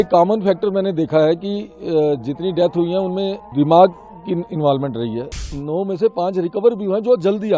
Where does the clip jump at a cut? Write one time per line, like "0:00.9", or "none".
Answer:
0:03.4
0:05.5